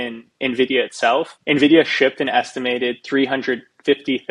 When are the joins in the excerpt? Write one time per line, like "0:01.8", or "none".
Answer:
0:01.3